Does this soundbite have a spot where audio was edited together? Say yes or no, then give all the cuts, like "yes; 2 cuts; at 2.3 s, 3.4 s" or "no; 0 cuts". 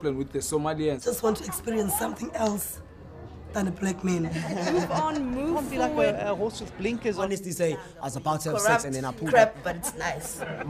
no; 0 cuts